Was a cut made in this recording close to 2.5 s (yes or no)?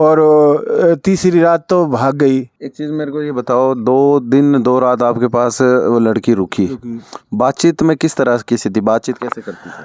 no